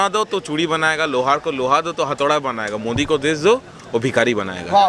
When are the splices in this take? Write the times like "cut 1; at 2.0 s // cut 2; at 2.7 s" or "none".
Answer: none